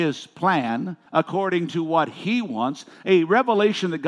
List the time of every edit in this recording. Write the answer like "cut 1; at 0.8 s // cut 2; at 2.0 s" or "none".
cut 1; at 1.0 s